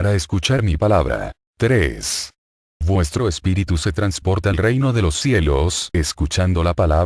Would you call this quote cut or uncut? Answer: cut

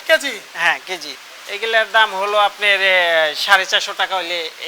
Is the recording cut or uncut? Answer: cut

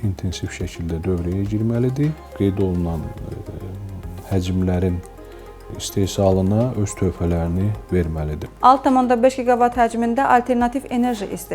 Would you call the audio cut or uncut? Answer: cut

